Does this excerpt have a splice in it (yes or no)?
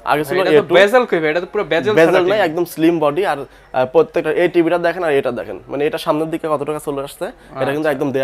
no